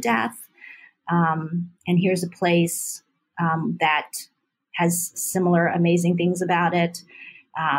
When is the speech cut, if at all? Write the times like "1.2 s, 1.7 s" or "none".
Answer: none